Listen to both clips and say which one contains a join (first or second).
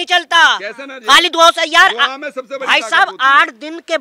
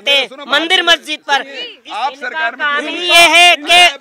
second